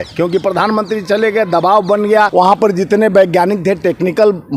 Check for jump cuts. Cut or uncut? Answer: cut